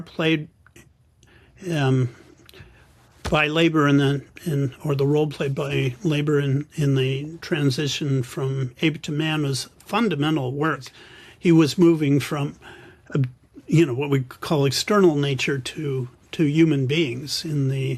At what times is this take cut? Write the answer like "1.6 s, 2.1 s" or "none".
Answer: 10.9 s